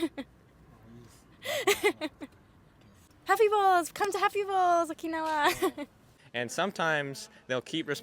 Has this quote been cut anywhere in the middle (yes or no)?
yes